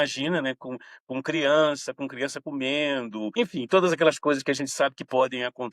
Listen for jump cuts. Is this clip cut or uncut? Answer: cut